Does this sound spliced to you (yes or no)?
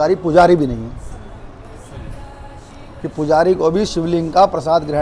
no